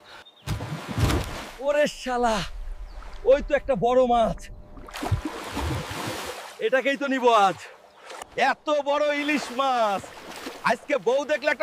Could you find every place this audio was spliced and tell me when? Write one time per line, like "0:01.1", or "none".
none